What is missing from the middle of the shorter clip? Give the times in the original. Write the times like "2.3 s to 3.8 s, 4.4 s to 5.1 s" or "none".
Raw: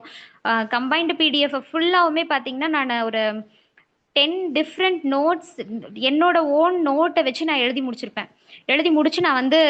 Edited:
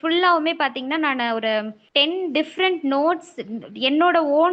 3.5 s to 4.0 s